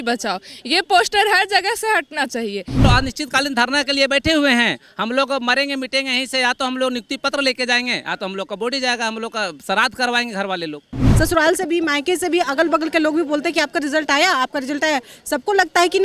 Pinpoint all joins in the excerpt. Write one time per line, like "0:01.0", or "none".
0:02.8
0:11.1